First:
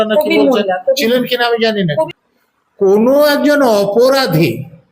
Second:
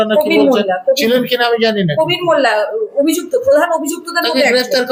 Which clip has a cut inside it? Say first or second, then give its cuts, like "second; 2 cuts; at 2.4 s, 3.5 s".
first; 1 cut; at 2.1 s